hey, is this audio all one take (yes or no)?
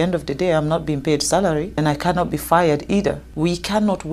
no